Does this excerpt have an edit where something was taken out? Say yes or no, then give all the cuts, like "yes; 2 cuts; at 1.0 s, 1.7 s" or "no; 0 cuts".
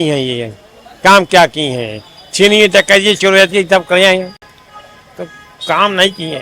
no; 0 cuts